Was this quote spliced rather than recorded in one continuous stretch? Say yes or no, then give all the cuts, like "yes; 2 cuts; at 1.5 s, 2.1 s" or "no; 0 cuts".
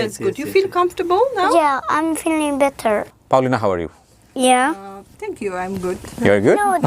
no; 0 cuts